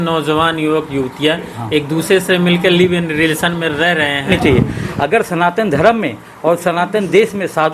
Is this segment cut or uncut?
cut